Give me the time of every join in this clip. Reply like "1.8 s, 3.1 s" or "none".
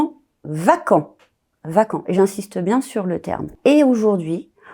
3.5 s